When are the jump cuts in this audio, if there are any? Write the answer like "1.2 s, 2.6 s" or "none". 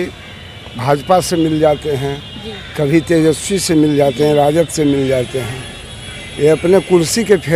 none